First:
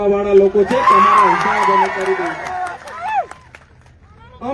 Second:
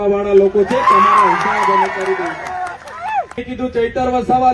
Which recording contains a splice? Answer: second; 1 cut; at 3.4 s

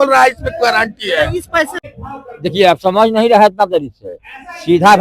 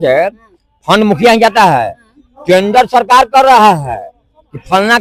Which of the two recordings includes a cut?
first; 1 cut; at 1.8 s

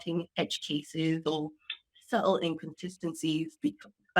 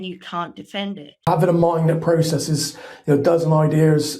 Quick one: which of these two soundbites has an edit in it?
second; 1 cut; at 1.3 s

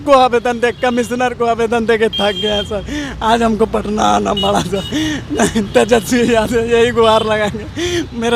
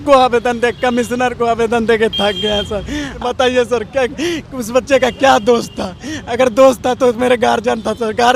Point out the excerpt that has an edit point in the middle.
second; 1 cut; at 3.2 s

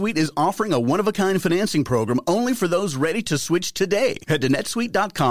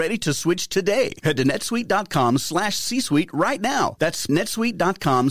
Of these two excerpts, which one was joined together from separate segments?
second; 1 cut; at 4.3 s

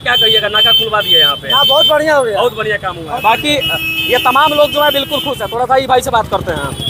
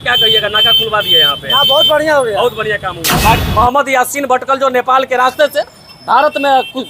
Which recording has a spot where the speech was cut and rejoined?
second; 1 cut; at 3.4 s

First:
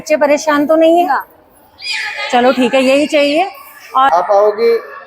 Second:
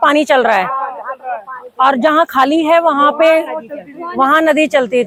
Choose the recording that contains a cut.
first; 1 cut; at 4.1 s

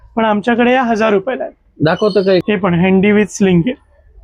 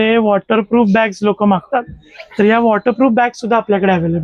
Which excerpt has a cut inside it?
first; 1 cut; at 2.4 s

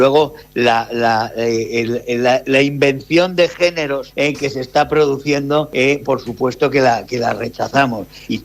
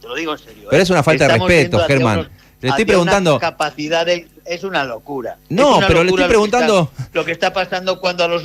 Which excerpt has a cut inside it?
first; 2 cuts; at 4.1 s, 5.7 s

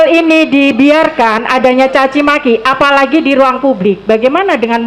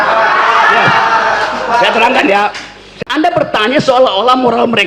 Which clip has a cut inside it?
second; 1 cut; at 2.9 s

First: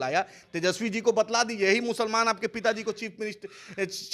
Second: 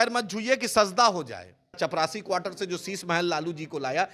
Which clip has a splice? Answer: second; 1 cut; at 1.8 s

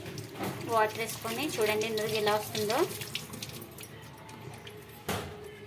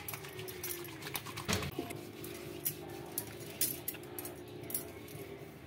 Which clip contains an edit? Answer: second; 1 cut; at 1.7 s

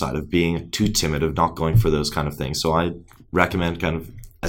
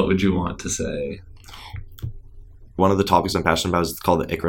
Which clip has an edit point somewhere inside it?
second; 1 cut; at 2.8 s

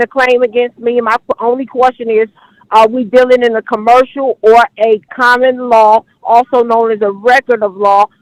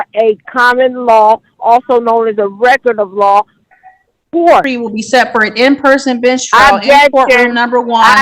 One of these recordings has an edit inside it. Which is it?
second; 1 cut; at 4.7 s

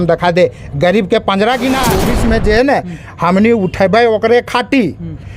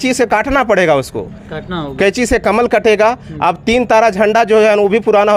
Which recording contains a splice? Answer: first; 1 cut; at 2.0 s

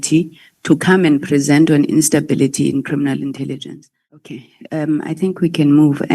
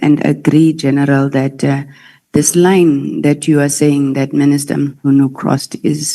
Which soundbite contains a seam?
first; 1 cut; at 4.3 s

